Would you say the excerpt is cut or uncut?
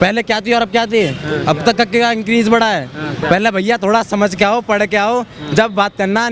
uncut